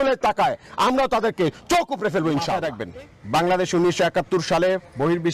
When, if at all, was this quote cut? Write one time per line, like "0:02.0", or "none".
0:02.7